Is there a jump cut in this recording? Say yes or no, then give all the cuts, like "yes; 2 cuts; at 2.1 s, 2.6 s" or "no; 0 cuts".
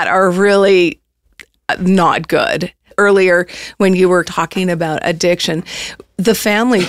yes; 2 cuts; at 2.9 s, 4.3 s